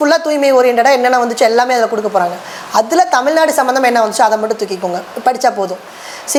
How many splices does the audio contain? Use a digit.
0